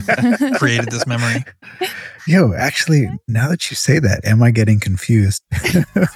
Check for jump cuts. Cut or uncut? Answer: uncut